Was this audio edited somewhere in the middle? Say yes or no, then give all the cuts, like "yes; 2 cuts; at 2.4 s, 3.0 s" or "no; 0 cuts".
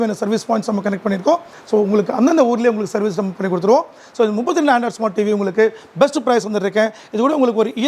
no; 0 cuts